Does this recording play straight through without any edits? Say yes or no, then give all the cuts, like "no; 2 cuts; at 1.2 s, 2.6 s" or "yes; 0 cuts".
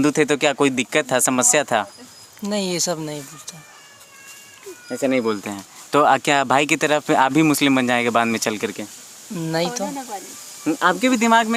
yes; 0 cuts